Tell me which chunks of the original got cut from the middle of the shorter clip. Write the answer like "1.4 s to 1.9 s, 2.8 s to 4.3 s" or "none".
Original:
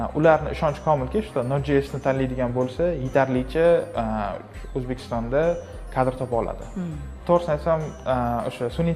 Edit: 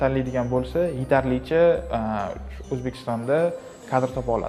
none